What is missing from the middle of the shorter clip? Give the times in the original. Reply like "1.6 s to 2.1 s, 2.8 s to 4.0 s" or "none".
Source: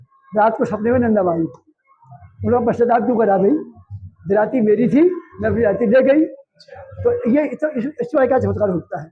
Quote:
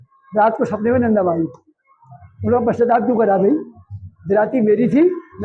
none